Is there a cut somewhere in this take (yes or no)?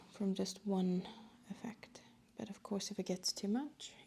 no